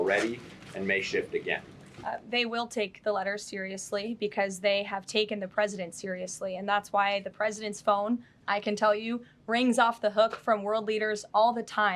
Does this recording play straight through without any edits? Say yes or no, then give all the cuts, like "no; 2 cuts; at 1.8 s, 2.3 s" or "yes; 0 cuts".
yes; 0 cuts